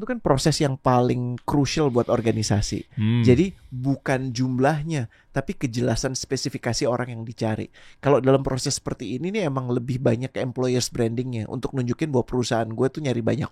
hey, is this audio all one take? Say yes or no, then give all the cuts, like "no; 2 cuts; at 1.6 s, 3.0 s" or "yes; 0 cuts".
yes; 0 cuts